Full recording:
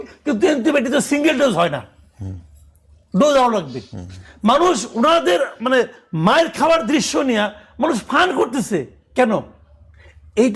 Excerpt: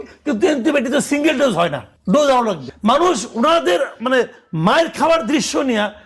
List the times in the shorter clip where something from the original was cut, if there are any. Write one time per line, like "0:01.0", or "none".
0:01.9
0:02.7